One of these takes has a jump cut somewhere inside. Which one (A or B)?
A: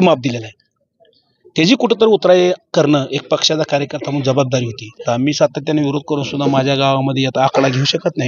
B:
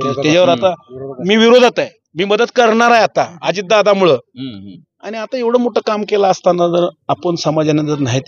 A